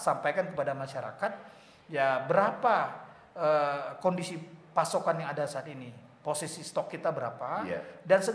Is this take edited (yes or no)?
no